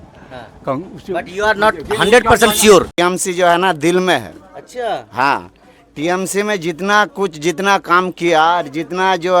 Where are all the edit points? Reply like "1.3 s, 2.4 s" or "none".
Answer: 2.9 s